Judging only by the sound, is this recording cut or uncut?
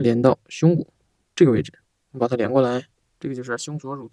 cut